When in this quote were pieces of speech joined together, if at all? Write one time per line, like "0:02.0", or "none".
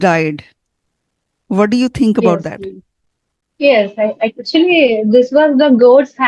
none